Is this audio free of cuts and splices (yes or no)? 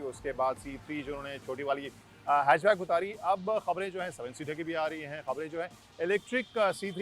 no